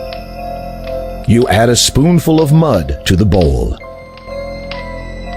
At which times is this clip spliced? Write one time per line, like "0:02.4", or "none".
0:01.2
0:04.1